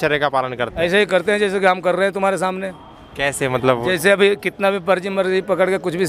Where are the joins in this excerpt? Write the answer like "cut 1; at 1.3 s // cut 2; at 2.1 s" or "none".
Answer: none